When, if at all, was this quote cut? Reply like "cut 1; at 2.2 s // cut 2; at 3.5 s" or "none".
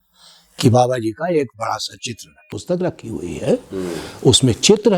cut 1; at 2.6 s